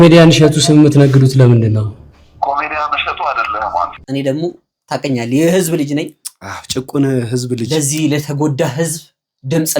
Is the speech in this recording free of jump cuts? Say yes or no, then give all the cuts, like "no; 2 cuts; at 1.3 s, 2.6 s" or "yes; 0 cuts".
no; 1 cut; at 4.0 s